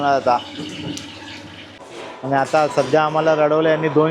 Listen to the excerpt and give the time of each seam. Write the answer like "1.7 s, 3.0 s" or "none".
1.8 s